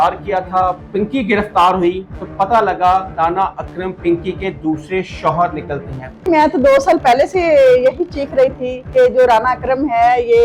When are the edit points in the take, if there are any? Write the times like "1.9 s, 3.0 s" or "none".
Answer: 0.8 s, 6.3 s

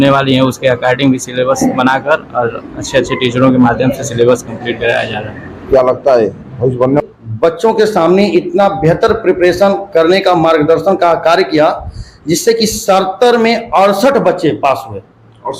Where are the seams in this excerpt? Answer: 7.0 s

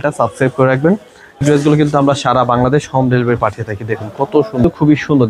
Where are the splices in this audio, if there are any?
1.4 s, 4.6 s

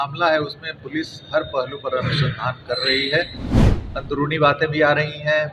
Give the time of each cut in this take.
none

